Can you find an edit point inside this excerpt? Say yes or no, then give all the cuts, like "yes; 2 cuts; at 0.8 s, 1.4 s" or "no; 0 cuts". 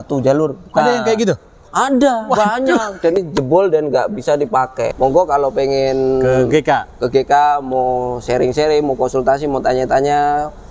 yes; 2 cuts; at 3.2 s, 4.9 s